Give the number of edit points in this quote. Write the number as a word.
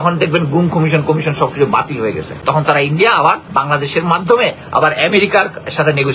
two